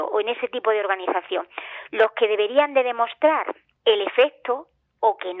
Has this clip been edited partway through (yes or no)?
yes